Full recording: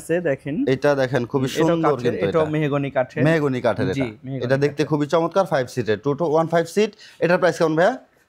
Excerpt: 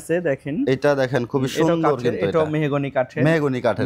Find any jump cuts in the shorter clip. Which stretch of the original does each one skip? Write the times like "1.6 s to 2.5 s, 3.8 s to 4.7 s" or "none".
none